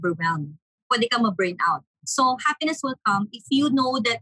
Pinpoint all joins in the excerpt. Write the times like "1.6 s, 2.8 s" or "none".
2.0 s, 3.3 s